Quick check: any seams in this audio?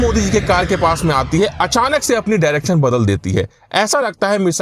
no; 0 cuts

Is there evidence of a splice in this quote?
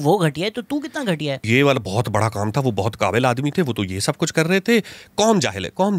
yes; 1 cut; at 1.4 s

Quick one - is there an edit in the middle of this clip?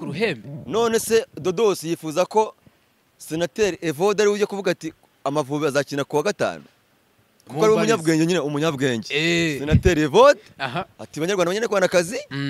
no; 0 cuts

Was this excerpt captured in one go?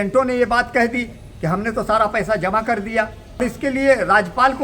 no; 1 cut; at 3.4 s

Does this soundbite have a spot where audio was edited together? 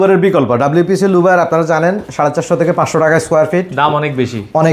no; 0 cuts

